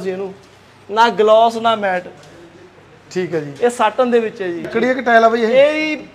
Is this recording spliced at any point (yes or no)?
yes